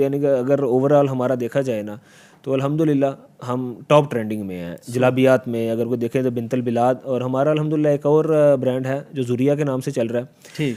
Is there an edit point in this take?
no; 0 cuts

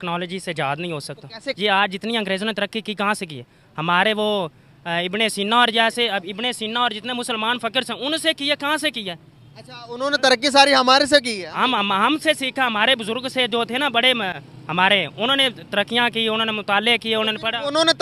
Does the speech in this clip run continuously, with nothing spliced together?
no; 1 cut; at 1.5 s

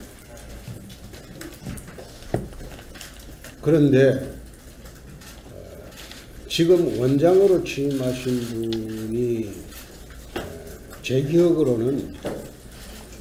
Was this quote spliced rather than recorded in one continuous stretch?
no; 0 cuts

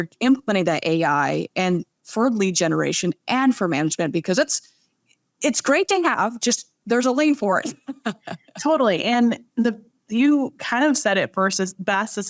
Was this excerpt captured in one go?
yes; 0 cuts

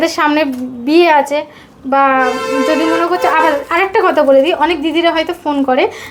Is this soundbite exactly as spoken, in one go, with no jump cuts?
yes; 0 cuts

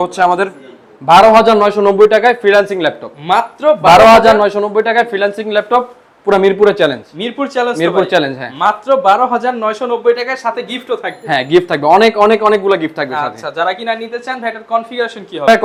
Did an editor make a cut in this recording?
no; 0 cuts

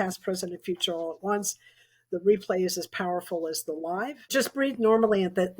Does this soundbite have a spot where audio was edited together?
yes; 1 cut; at 4.3 s

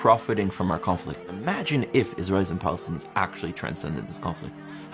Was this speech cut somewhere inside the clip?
yes; 1 cut; at 1.3 s

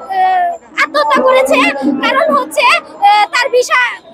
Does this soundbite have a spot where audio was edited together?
no; 0 cuts

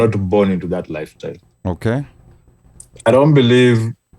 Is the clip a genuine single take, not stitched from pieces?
no; 1 cut; at 2.2 s

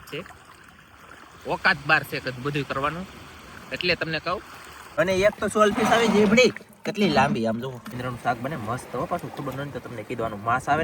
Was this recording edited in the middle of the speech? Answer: yes; 2 cuts; at 4.8 s, 8.0 s

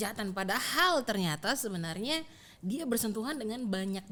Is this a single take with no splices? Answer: yes; 0 cuts

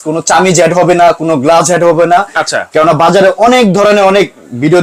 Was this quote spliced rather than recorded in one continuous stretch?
no; 0 cuts

